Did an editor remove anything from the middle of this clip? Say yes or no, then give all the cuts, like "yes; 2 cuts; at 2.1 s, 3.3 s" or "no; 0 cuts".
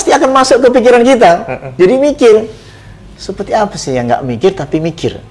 no; 0 cuts